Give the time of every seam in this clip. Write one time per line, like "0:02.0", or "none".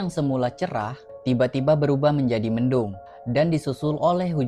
none